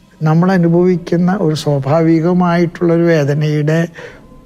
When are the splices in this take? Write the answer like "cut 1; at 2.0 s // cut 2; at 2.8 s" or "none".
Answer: none